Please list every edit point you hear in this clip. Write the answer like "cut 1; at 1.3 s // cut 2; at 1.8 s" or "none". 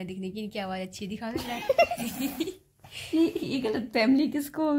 none